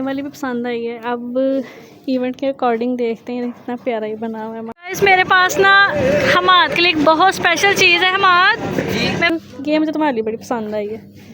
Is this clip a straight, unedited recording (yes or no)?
no